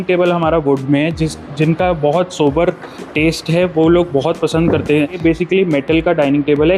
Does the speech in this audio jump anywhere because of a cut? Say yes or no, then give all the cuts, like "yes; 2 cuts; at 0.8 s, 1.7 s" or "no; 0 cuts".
yes; 1 cut; at 5.2 s